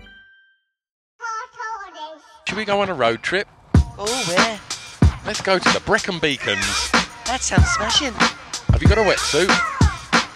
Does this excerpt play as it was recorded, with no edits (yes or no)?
no